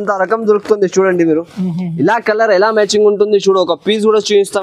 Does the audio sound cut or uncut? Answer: uncut